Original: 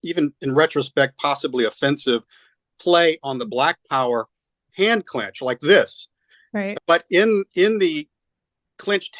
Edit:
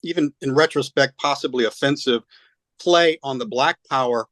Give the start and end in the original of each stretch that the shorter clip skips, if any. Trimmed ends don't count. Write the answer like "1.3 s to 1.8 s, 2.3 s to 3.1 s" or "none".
none